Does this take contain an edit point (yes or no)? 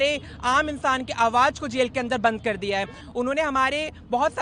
yes